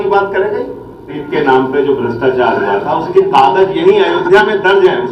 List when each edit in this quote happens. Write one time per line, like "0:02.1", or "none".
0:01.2